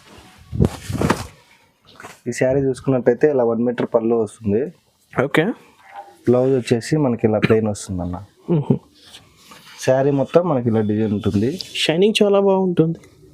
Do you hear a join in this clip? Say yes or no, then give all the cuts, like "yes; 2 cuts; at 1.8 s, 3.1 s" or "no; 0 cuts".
no; 0 cuts